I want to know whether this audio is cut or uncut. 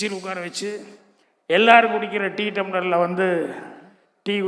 uncut